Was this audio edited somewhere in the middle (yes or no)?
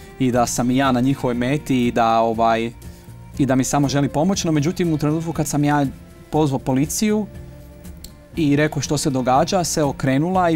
no